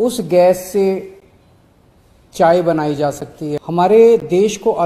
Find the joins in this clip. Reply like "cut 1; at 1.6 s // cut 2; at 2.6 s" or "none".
cut 1; at 3.6 s